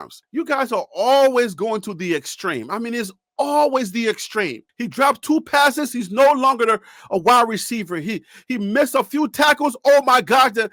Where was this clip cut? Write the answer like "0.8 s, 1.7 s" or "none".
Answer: none